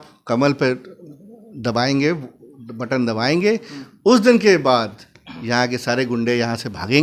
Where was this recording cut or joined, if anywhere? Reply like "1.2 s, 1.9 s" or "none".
none